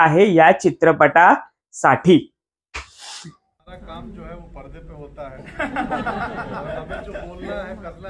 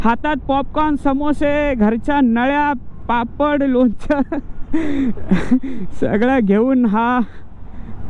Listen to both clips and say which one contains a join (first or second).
first